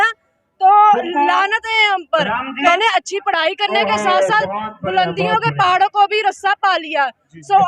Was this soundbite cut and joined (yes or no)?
yes